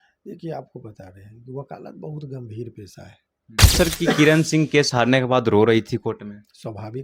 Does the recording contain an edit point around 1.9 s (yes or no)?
no